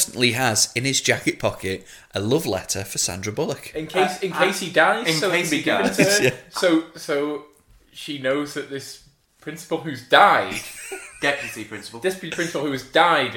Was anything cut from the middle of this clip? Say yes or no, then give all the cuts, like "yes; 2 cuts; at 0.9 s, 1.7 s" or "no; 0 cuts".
no; 0 cuts